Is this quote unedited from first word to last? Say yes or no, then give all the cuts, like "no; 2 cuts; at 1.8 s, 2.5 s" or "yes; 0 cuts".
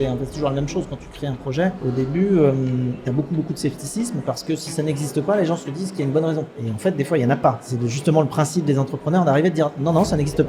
no; 3 cuts; at 1.8 s, 6.6 s, 7.7 s